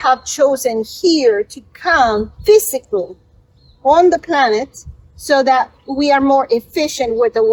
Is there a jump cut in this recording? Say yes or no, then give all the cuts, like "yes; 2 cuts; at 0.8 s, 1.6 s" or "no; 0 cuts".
no; 0 cuts